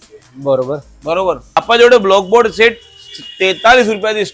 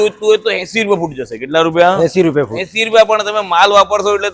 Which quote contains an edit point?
first; 1 cut; at 1.4 s

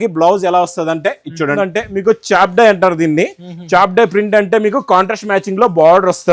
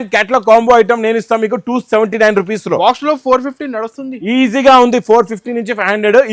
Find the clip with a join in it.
first; 1 cut; at 1.6 s

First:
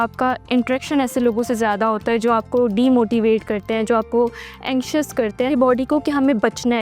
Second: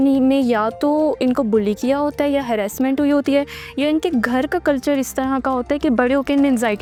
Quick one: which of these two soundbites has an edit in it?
first; 1 cut; at 5.5 s

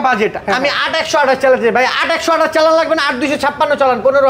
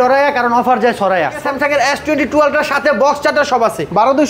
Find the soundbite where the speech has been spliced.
second; 1 cut; at 1.4 s

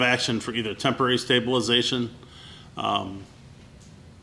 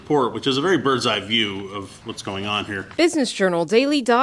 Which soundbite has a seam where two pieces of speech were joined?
second; 1 cut; at 2.9 s

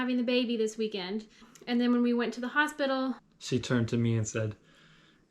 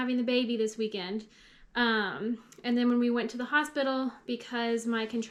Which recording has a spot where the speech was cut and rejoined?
first; 2 cuts; at 1.5 s, 3.2 s

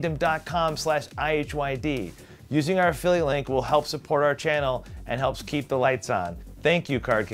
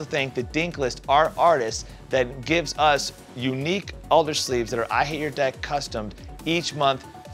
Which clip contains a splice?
first; 1 cut; at 6.4 s

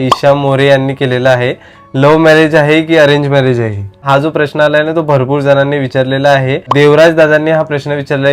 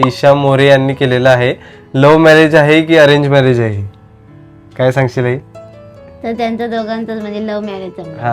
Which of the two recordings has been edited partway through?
first; 2 cuts; at 4.0 s, 6.7 s

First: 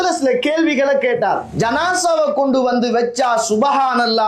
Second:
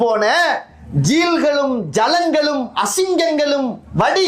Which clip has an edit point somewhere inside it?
first; 1 cut; at 1.5 s

